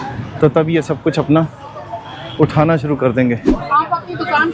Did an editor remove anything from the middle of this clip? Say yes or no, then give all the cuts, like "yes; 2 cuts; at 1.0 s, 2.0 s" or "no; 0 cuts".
yes; 1 cut; at 3.5 s